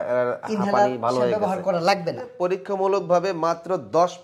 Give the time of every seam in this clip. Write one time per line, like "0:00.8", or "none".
0:02.3